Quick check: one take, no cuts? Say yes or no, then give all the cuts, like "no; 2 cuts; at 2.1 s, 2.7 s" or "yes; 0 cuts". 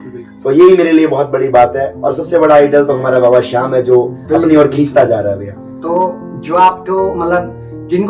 yes; 0 cuts